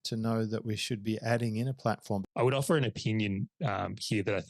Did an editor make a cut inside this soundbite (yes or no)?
yes